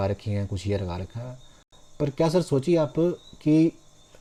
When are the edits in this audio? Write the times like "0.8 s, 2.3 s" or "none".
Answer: none

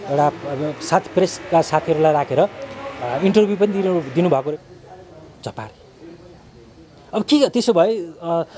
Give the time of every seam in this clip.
4.5 s

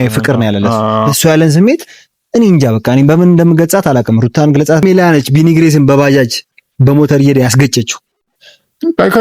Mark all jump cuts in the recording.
4.8 s

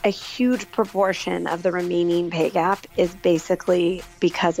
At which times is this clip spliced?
none

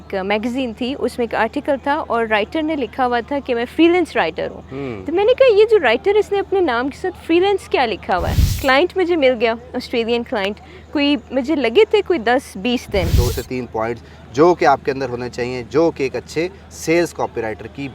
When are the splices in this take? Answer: 8.5 s, 13.1 s

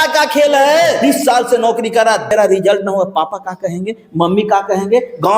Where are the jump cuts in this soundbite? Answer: 1.0 s, 2.3 s

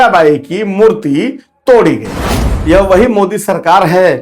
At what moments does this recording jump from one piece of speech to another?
2.5 s

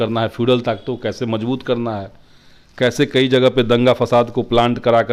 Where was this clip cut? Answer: none

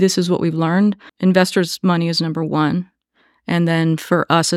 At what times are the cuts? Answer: 1.1 s

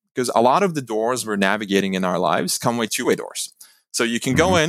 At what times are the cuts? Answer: 3.0 s

